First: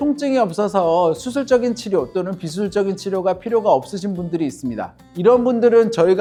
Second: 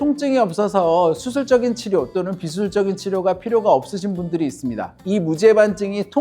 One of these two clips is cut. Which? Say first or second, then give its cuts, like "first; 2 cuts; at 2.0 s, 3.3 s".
second; 1 cut; at 5.0 s